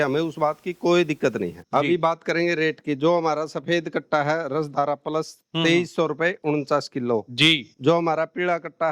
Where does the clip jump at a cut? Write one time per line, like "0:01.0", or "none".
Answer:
0:01.6

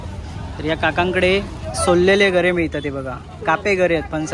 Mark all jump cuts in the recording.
none

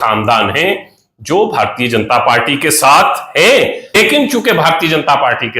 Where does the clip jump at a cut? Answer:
0:03.9

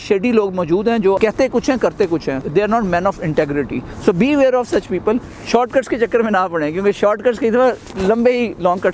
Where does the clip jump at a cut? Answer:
0:01.2
0:02.4
0:03.9
0:05.3

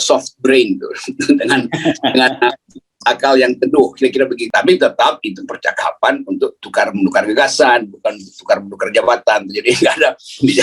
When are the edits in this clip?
0:04.4

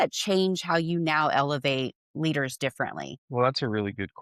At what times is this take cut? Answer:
0:03.2

